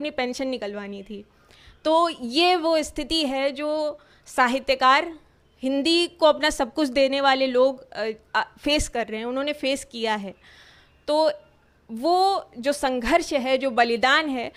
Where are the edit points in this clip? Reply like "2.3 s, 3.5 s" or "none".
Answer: none